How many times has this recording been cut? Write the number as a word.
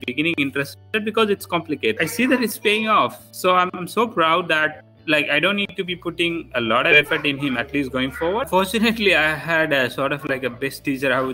two